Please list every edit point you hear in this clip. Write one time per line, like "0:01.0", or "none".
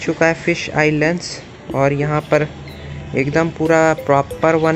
none